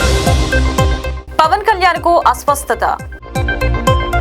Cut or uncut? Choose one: uncut